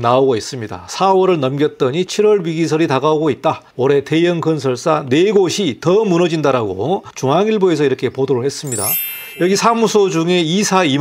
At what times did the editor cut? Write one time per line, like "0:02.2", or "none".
0:03.7
0:07.1
0:09.0